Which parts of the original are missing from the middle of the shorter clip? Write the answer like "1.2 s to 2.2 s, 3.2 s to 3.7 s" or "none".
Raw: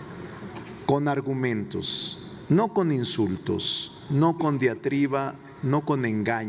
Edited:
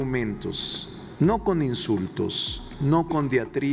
none